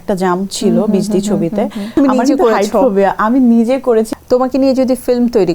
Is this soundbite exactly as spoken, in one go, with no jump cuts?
no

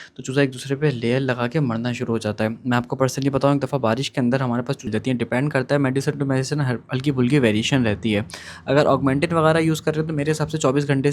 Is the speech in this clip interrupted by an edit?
yes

